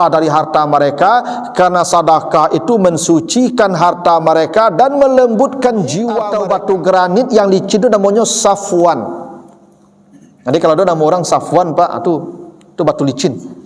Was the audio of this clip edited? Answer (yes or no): yes